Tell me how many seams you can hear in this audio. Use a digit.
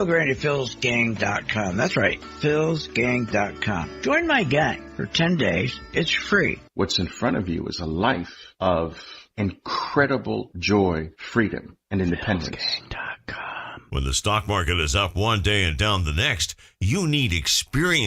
1